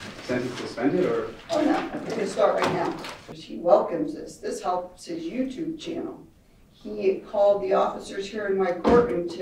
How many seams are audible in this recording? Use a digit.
1